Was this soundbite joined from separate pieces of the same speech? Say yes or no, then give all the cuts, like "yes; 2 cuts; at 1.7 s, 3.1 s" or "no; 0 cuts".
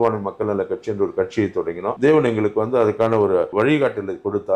yes; 2 cuts; at 2.0 s, 3.5 s